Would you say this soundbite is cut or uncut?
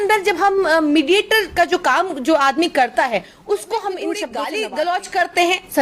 cut